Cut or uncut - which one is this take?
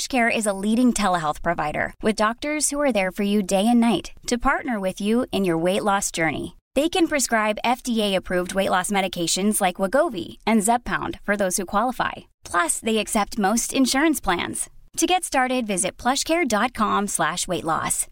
uncut